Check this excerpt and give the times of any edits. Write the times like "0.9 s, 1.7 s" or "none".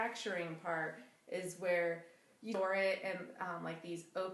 2.6 s

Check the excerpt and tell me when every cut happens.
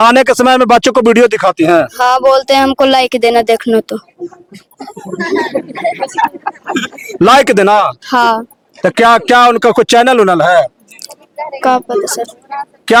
none

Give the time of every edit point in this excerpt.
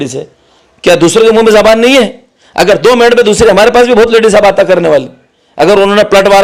none

